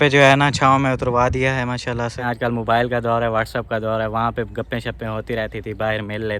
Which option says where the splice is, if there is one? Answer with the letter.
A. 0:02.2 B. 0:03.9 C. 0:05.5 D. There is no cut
A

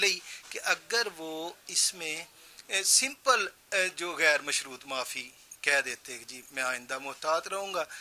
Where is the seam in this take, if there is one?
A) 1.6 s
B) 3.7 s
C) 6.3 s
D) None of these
D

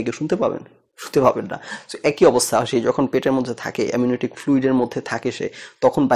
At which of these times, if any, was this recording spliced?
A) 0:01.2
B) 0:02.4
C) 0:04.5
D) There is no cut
D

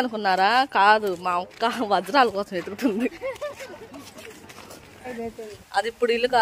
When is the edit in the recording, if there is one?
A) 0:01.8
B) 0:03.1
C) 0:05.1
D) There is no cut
C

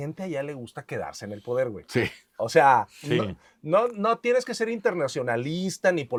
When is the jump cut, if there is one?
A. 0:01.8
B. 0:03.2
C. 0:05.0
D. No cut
D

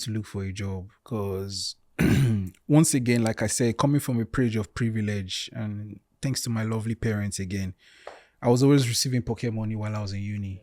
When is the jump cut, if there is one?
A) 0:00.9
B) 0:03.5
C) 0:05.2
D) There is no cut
A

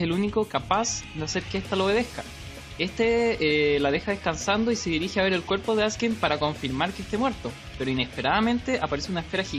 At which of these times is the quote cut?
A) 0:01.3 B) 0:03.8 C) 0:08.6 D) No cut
A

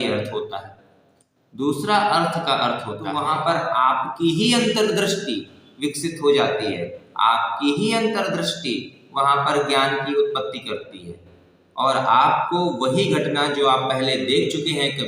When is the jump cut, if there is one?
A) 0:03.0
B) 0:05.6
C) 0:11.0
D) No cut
A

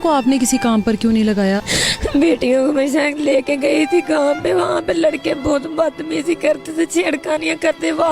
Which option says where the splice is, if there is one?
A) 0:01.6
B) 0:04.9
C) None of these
A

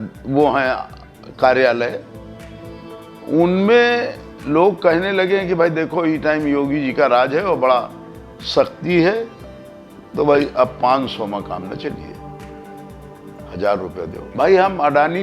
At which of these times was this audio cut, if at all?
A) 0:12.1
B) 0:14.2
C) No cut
B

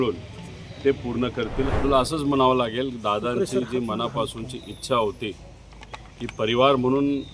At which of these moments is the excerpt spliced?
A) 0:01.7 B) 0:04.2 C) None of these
A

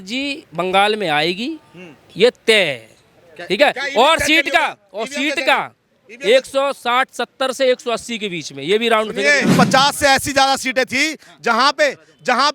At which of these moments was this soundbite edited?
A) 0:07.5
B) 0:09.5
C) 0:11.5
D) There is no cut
B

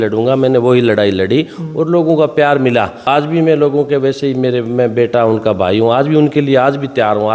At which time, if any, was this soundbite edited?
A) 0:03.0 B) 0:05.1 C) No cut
A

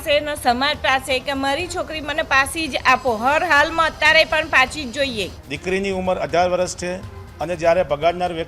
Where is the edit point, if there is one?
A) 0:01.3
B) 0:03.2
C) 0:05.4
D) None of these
C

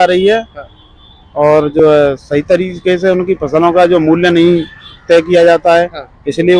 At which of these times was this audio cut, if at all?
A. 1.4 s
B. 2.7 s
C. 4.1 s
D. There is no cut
D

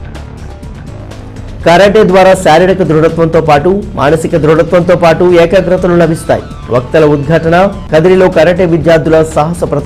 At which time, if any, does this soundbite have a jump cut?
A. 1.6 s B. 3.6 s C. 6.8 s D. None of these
A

